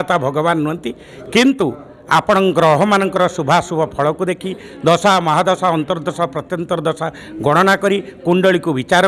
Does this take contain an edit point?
no; 0 cuts

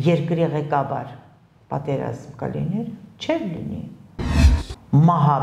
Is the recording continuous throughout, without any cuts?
no; 1 cut; at 4.5 s

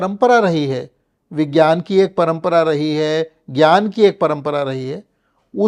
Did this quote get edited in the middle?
no; 0 cuts

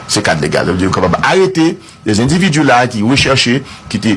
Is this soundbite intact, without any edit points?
no; 1 cut; at 1.5 s

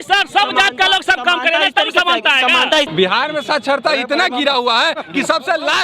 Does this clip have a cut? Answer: yes; 1 cut; at 2.9 s

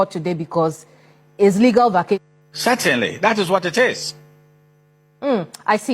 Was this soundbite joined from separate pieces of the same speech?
yes; 1 cut; at 2.2 s

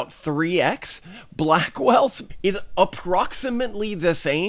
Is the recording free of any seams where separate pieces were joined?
no; 1 cut; at 2.2 s

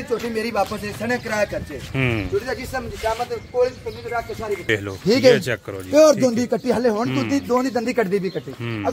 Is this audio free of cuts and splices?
no; 1 cut; at 4.7 s

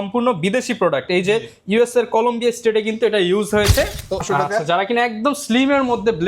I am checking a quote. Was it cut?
yes; 1 cut; at 4.2 s

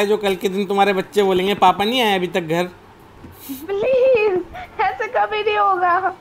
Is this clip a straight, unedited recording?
yes; 0 cuts

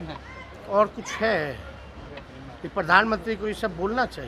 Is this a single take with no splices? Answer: yes; 0 cuts

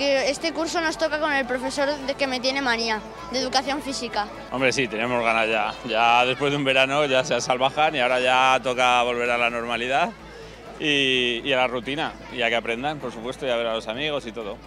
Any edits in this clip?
yes; 1 cut; at 4.4 s

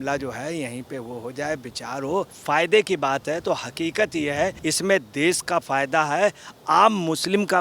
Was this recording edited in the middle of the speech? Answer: yes; 2 cuts; at 2.4 s, 4.6 s

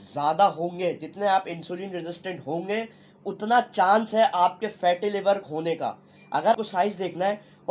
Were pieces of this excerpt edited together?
yes; 1 cut; at 6.5 s

